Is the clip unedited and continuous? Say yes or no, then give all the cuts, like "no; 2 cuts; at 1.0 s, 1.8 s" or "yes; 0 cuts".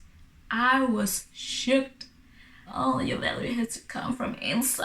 no; 1 cut; at 2.7 s